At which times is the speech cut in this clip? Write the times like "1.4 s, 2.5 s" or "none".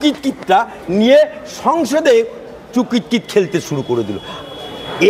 none